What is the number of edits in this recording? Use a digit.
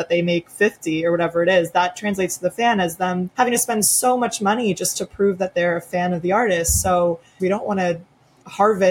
2